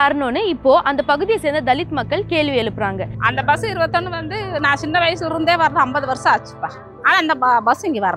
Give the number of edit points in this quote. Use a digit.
1